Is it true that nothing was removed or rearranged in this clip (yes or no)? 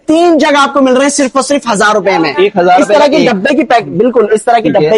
yes